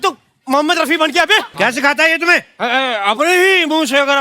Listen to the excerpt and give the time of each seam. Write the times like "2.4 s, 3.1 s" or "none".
1.5 s

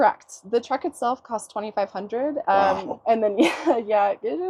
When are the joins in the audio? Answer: none

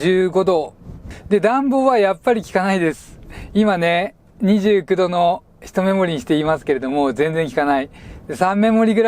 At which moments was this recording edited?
1.1 s

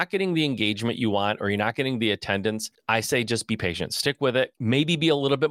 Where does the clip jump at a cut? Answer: 2.7 s, 4.6 s

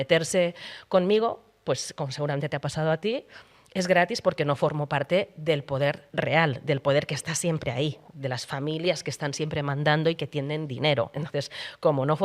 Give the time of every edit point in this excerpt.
6.1 s

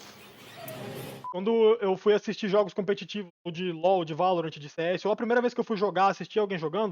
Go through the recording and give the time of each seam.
1.3 s

